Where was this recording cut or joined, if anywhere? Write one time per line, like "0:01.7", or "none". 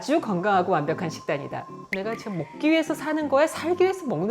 0:01.8